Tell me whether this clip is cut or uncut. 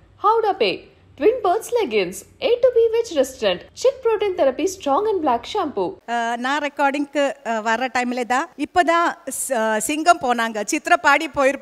cut